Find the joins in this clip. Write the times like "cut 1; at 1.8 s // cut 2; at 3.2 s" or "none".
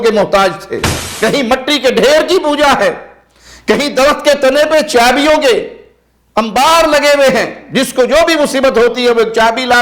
cut 1; at 1.0 s